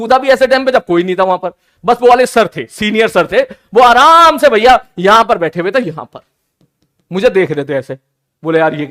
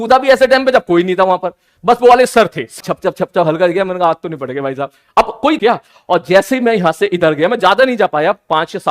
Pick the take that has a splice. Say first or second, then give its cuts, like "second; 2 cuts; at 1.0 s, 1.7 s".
second; 2 cuts; at 2.8 s, 5.6 s